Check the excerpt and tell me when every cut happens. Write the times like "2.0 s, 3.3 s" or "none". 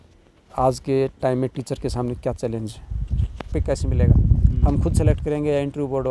3.5 s